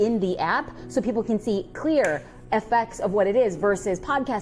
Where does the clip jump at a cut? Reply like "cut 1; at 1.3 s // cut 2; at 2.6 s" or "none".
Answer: none